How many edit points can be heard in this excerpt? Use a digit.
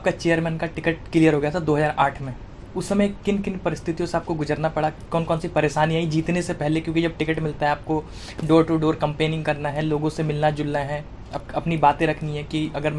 0